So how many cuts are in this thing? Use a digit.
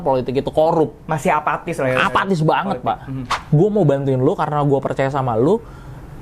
1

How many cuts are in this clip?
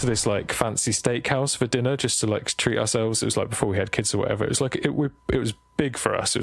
0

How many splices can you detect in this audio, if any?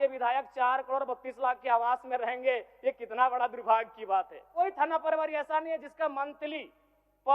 1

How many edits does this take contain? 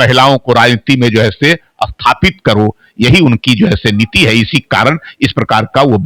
0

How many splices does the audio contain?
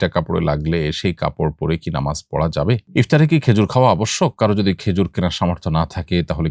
1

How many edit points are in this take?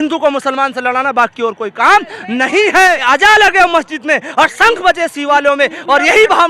1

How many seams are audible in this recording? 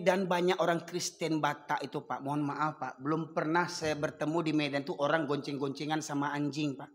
0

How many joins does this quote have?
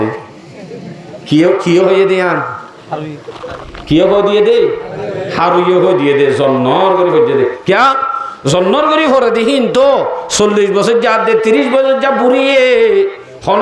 0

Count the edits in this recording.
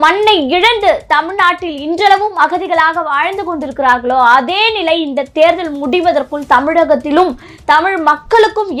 0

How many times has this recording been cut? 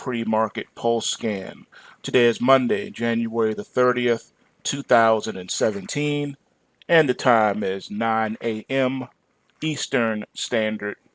0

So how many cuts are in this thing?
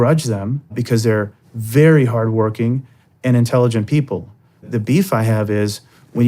2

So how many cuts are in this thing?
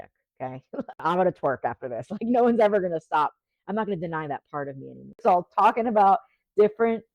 2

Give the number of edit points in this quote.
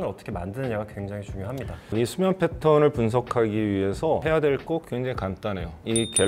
1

